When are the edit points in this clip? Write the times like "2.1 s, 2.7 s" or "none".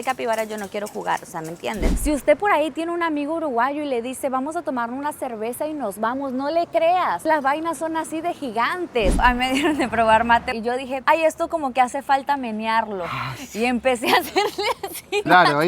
2.0 s, 9.2 s, 10.5 s